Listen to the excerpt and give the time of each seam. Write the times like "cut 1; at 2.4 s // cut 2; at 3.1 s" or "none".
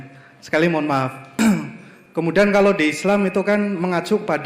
cut 1; at 1.2 s